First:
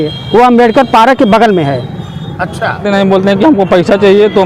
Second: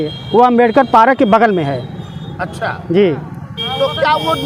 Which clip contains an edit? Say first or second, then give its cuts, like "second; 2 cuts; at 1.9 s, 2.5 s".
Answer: first; 1 cut; at 2.8 s